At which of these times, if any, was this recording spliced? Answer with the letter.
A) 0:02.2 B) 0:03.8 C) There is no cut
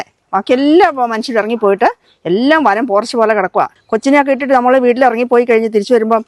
B